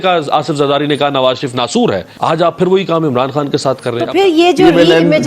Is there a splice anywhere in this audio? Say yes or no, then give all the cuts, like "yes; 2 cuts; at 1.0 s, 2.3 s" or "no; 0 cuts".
yes; 2 cuts; at 2.1 s, 4.1 s